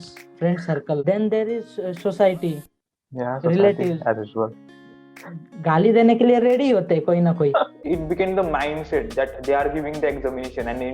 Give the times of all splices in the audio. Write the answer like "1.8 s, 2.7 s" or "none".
1.0 s, 7.8 s